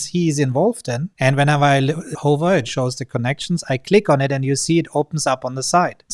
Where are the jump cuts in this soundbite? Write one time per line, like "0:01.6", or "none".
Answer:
0:02.1